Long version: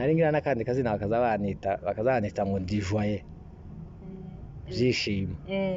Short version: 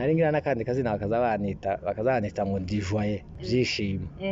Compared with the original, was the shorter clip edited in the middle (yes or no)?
yes